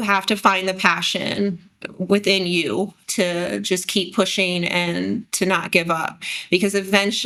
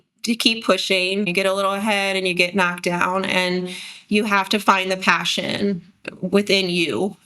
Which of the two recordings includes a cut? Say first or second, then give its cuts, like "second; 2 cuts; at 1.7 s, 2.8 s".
second; 1 cut; at 1.3 s